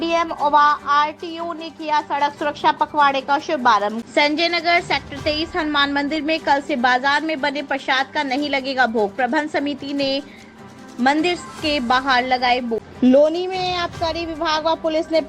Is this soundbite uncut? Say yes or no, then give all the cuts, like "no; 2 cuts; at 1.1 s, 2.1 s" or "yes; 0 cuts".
no; 2 cuts; at 4.0 s, 12.8 s